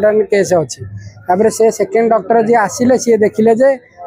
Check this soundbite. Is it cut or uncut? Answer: uncut